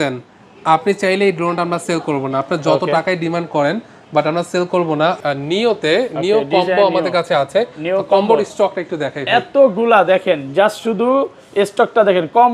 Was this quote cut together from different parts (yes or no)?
yes